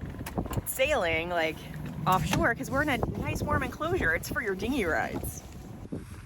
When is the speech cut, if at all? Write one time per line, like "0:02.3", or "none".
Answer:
none